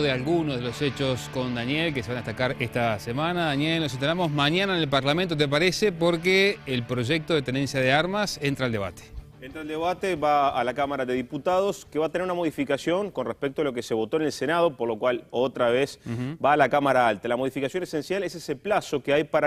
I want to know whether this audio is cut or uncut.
cut